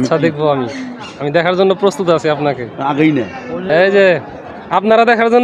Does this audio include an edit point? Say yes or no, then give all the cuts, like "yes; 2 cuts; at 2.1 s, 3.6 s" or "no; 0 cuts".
no; 0 cuts